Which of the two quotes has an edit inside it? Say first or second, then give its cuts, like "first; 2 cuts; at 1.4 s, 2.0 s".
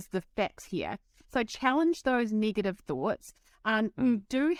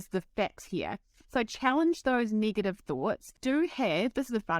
second; 1 cut; at 3.4 s